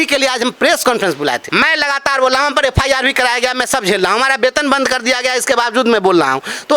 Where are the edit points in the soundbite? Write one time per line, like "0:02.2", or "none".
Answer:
0:01.4